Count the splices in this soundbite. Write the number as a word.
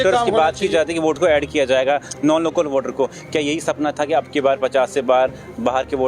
one